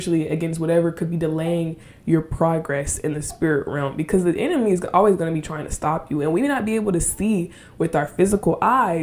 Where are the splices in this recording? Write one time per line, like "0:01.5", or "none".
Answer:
none